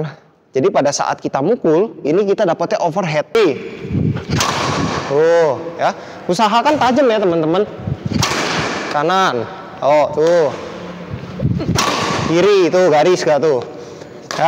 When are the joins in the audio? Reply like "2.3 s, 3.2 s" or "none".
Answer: 3.4 s